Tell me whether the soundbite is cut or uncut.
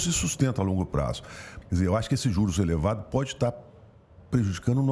cut